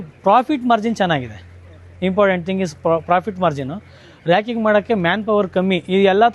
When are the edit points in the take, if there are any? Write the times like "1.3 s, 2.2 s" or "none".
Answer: none